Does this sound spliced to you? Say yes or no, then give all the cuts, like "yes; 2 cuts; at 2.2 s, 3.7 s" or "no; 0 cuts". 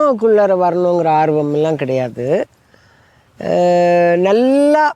no; 0 cuts